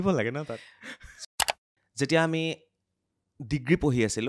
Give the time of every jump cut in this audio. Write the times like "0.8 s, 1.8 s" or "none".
1.3 s